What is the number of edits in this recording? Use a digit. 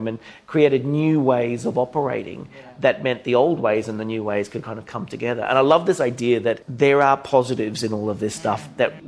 1